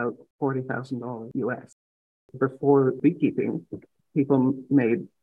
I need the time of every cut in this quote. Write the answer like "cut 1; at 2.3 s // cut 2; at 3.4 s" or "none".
cut 1; at 1.3 s // cut 2; at 2.2 s // cut 3; at 3.0 s